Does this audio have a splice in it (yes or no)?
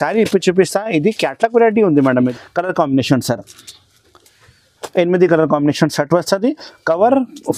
yes